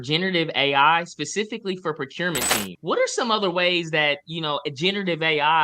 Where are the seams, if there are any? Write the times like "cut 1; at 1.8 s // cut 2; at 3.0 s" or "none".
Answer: cut 1; at 2.7 s